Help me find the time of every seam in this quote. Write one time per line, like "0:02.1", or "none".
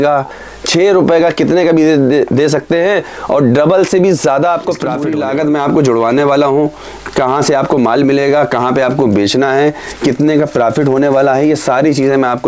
0:05.0